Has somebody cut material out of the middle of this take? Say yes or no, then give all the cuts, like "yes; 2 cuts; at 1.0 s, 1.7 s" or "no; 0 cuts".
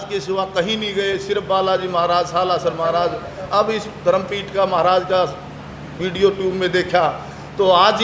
no; 0 cuts